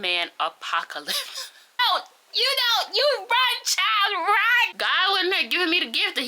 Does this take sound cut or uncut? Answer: cut